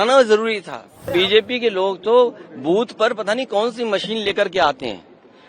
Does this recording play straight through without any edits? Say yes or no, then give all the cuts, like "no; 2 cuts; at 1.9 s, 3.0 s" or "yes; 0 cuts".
no; 1 cut; at 1.1 s